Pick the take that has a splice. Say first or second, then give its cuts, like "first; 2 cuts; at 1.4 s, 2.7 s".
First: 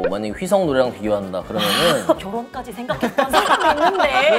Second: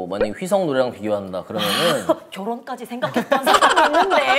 first; 1 cut; at 2.2 s